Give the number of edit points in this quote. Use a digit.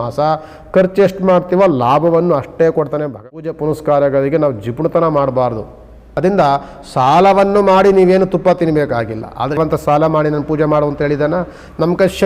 3